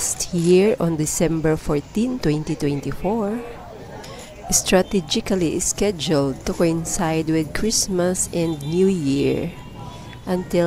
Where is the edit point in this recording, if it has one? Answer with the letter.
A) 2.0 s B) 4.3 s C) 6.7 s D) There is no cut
D